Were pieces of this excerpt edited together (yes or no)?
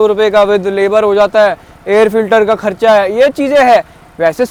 no